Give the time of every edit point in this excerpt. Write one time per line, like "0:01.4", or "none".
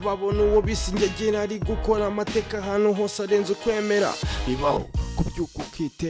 0:04.8